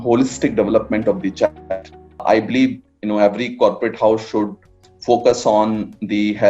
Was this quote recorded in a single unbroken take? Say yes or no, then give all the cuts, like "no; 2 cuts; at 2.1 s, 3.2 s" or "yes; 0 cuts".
no; 1 cut; at 2.2 s